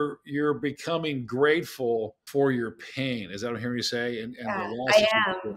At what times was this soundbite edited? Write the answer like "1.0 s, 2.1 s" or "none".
2.2 s